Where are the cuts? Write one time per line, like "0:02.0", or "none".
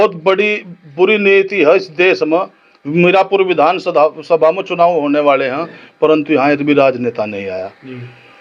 none